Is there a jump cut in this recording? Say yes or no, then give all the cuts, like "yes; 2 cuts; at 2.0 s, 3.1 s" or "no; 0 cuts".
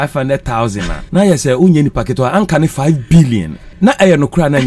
yes; 2 cuts; at 0.9 s, 3.6 s